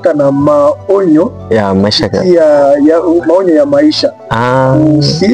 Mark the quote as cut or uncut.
uncut